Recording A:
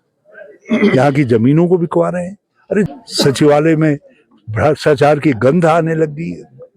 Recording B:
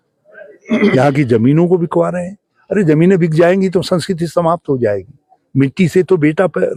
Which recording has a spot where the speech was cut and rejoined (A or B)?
A